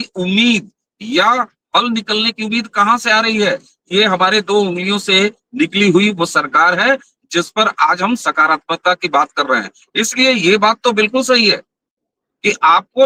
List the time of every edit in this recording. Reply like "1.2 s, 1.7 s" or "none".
none